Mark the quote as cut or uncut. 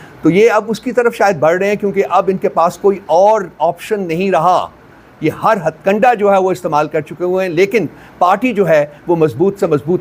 uncut